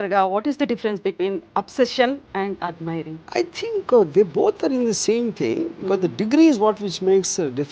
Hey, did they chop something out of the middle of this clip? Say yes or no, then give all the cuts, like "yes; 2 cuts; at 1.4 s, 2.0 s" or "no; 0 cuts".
yes; 1 cut; at 3.3 s